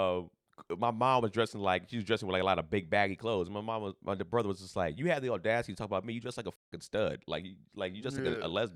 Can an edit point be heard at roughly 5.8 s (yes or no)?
no